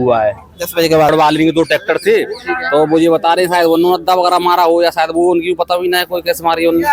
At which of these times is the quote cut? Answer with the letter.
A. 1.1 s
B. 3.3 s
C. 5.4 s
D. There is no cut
A